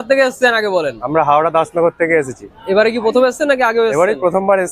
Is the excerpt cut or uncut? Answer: uncut